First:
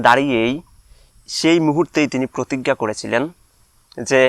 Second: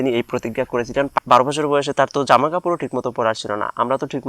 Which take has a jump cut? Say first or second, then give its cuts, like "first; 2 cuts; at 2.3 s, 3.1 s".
second; 1 cut; at 1.2 s